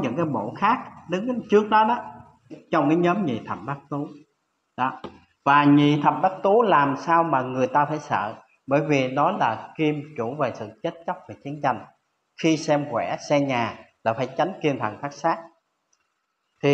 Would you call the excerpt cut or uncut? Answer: cut